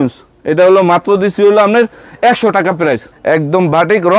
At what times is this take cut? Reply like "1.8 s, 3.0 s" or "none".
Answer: 3.1 s